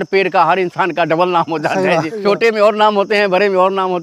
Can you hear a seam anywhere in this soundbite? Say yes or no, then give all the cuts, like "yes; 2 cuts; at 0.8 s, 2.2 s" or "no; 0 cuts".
yes; 1 cut; at 2.1 s